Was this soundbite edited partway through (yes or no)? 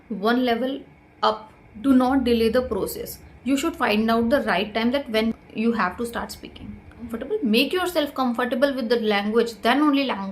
yes